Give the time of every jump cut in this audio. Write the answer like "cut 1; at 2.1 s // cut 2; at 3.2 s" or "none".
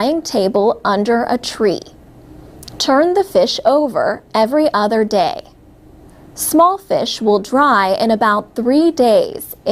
cut 1; at 3.2 s